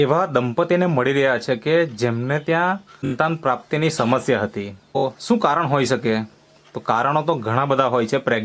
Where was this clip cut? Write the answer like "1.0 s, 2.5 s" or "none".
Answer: 3.1 s, 5.0 s

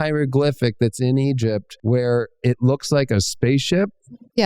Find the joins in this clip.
1.7 s

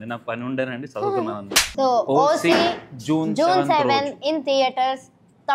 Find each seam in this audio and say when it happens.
1.7 s

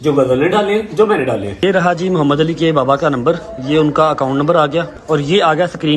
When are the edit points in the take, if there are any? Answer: 1.6 s, 4.9 s

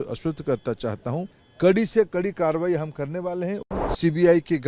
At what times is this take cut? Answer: 1.4 s, 3.6 s

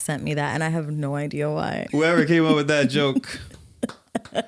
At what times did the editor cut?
1.9 s

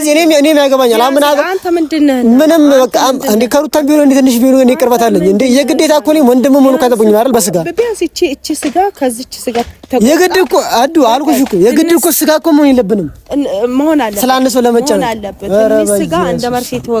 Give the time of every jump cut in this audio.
none

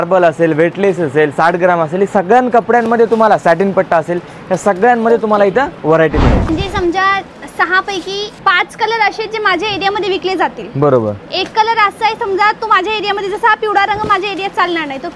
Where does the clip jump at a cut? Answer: 6.5 s, 8.3 s

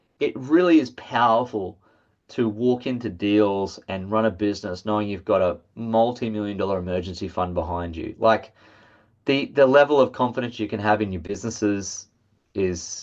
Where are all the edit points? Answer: none

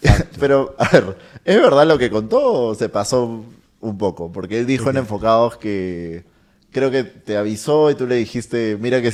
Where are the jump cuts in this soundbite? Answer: none

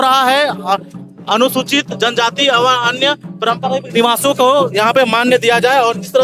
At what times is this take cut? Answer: none

